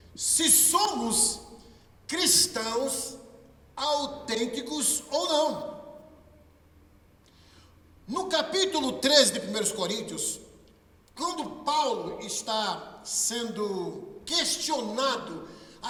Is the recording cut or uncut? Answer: uncut